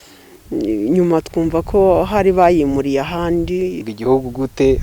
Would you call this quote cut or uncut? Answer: cut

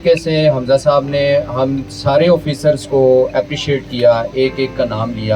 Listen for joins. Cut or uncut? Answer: uncut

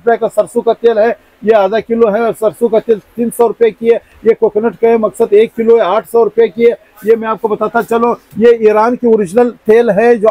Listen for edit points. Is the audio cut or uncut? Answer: uncut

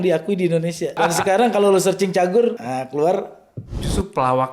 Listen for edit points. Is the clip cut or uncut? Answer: cut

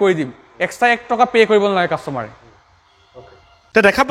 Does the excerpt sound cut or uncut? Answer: uncut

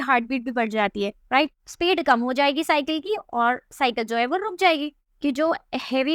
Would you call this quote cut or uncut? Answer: cut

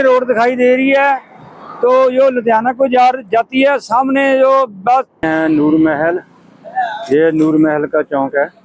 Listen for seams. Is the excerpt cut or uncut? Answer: cut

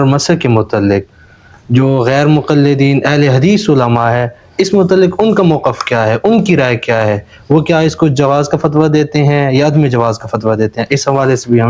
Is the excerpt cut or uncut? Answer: uncut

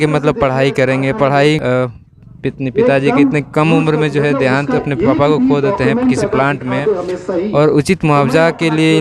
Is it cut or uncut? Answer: cut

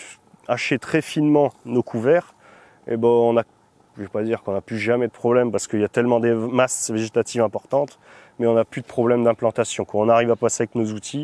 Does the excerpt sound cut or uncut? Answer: uncut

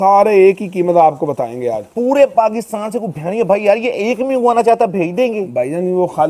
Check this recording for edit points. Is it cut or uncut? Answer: cut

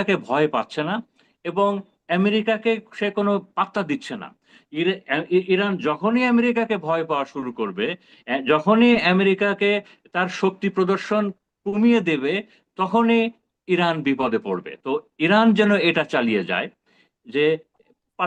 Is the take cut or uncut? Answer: uncut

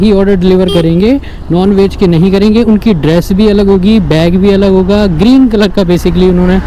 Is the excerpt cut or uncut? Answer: uncut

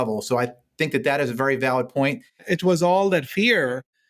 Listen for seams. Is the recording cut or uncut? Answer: cut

